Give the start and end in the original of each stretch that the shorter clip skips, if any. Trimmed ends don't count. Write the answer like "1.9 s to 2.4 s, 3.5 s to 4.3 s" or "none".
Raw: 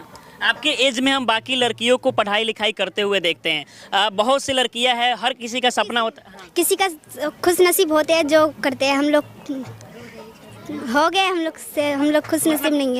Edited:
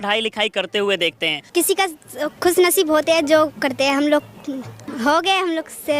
3.6 s to 6.3 s, 9.8 s to 10.7 s